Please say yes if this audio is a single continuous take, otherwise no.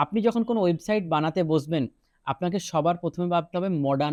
yes